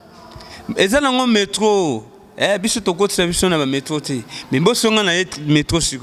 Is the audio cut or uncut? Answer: uncut